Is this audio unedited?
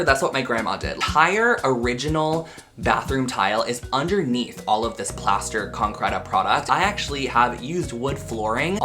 no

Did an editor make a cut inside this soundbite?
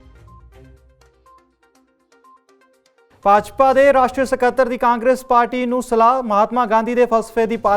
yes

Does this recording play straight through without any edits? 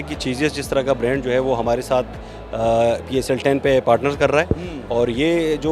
yes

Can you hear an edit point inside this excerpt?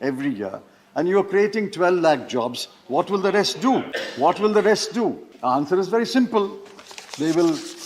yes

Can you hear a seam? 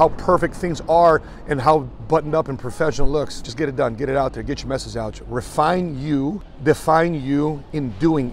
yes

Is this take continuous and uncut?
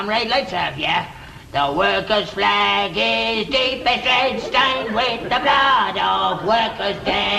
yes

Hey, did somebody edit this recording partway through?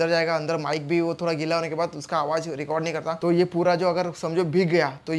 yes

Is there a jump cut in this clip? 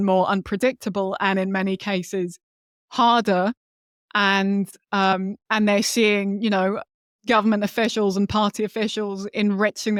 no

